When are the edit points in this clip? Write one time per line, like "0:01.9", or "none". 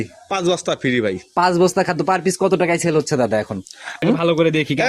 0:04.0